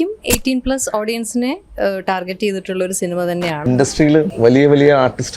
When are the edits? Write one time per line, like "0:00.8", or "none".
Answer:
0:03.6
0:04.3